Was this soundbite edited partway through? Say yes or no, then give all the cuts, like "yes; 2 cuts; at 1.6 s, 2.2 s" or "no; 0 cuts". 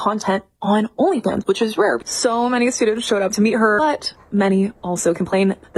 no; 0 cuts